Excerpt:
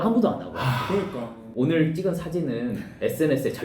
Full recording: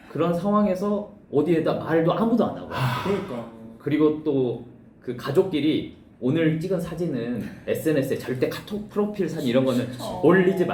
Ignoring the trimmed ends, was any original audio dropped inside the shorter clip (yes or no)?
yes